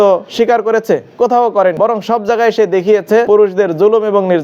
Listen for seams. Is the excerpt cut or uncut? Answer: cut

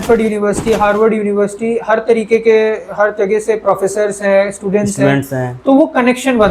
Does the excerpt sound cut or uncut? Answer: uncut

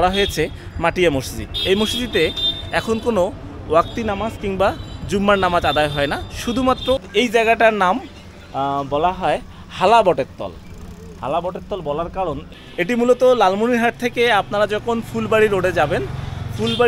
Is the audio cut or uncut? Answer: cut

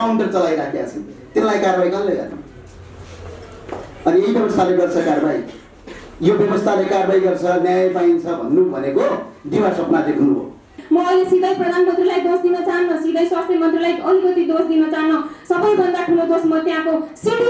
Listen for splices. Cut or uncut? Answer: cut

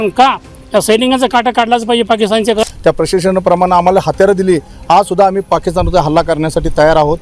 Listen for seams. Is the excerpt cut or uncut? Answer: cut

